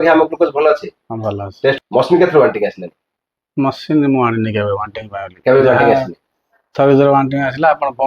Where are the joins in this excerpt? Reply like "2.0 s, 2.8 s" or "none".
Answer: 1.7 s